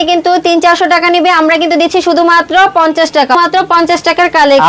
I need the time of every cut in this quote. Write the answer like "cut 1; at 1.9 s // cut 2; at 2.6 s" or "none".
cut 1; at 3.3 s

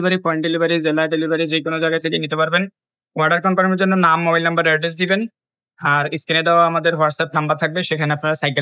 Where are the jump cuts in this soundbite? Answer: none

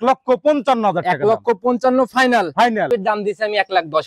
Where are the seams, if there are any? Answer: cut 1; at 2.9 s

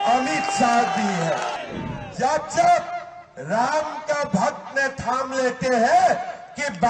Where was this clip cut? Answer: cut 1; at 1.6 s

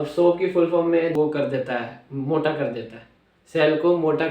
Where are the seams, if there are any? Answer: cut 1; at 1.1 s

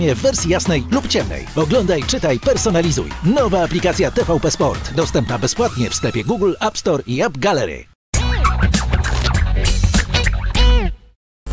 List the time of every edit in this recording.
cut 1; at 8.0 s

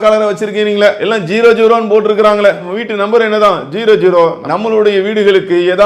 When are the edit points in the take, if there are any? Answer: cut 1; at 1.0 s

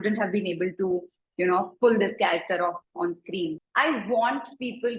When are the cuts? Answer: cut 1; at 3.6 s

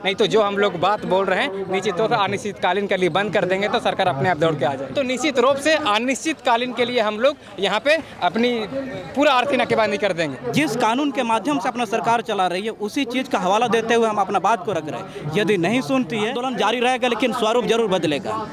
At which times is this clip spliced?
cut 1; at 4.8 s // cut 2; at 10.4 s // cut 3; at 16.4 s

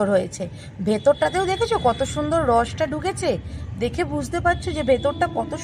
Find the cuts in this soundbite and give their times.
none

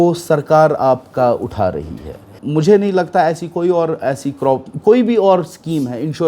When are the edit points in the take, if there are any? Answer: cut 1; at 2.4 s

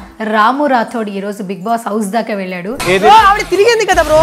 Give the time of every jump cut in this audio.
cut 1; at 2.7 s

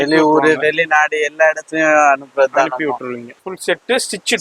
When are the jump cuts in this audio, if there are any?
cut 1; at 3.3 s

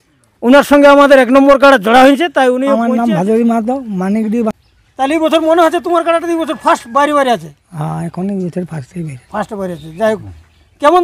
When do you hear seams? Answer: cut 1; at 2.8 s // cut 2; at 4.5 s

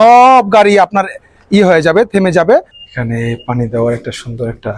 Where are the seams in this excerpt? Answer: cut 1; at 2.8 s

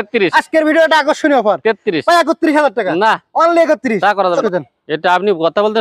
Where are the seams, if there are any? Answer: cut 1; at 4.4 s

